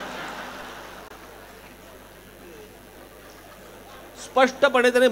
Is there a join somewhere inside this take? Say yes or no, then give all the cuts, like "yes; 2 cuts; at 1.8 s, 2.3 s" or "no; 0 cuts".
no; 0 cuts